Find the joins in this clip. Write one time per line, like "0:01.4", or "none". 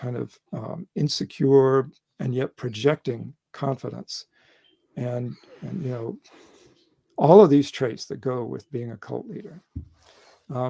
none